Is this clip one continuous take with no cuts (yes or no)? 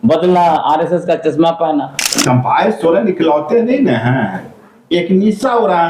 no